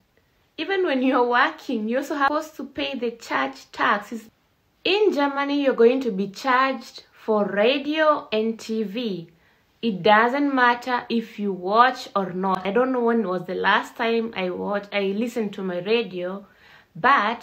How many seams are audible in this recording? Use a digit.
2